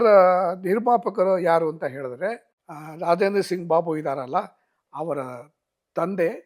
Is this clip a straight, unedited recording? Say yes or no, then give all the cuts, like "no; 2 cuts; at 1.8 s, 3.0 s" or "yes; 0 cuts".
yes; 0 cuts